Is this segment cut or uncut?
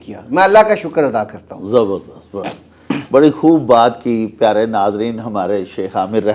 uncut